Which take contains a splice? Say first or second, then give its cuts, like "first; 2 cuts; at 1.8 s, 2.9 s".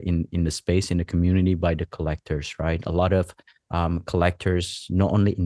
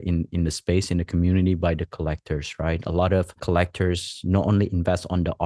second; 1 cut; at 3.4 s